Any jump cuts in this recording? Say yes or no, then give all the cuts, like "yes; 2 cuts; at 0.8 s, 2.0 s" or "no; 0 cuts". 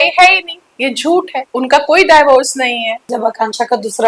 yes; 2 cuts; at 1.4 s, 3.0 s